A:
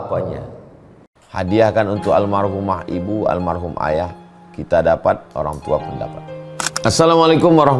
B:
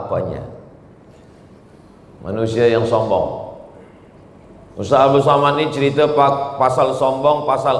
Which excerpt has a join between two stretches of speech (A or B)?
A